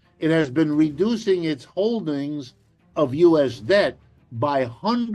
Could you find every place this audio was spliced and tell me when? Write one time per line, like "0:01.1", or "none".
none

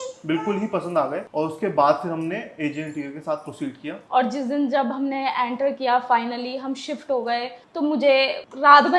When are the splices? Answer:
0:01.2
0:04.0

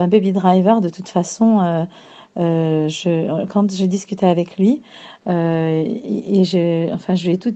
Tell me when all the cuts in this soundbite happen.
0:06.5

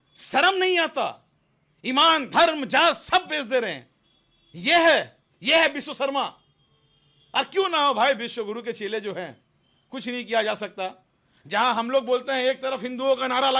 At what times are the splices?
none

